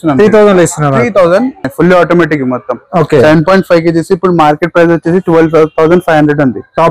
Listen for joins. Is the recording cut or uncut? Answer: cut